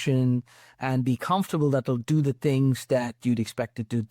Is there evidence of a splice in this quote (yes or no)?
no